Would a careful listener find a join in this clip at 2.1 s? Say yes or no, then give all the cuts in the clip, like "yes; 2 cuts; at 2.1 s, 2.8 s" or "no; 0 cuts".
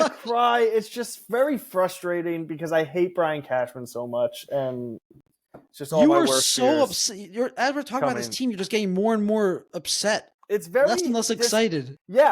no; 1 cut; at 10.3 s